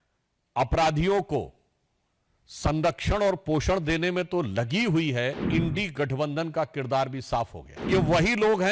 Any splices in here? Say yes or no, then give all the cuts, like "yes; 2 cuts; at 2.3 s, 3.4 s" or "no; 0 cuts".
yes; 2 cuts; at 5.5 s, 7.9 s